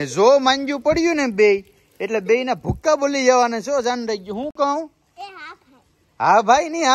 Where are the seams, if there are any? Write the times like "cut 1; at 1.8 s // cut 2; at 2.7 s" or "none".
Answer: none